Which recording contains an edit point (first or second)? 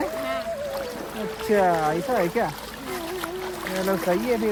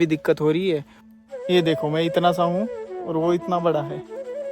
second